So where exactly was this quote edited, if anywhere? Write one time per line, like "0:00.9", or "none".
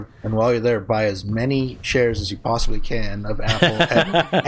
none